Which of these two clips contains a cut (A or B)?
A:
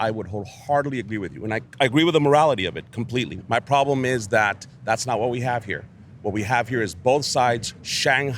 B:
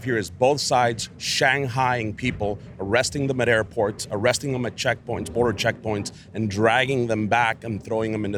A